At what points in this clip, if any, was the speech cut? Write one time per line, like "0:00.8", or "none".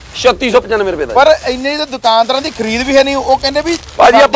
none